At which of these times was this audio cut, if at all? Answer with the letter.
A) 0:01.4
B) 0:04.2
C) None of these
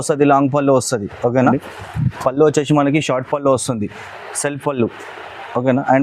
A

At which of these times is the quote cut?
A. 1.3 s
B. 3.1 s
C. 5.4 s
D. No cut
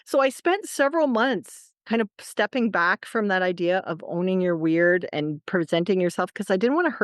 C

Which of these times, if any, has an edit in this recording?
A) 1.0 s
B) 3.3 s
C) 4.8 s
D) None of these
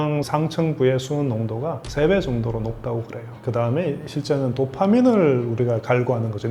B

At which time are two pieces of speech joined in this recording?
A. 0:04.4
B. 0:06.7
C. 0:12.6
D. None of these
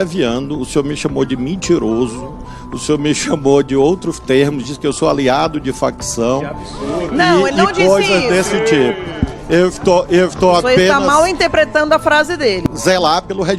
C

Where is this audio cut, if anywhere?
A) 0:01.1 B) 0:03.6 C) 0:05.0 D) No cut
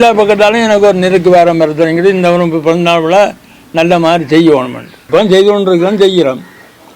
C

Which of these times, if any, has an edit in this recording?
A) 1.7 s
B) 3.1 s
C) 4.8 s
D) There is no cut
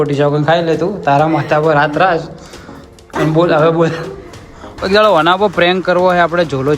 C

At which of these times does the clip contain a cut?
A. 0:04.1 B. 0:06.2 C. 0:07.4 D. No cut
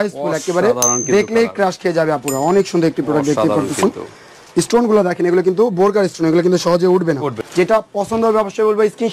C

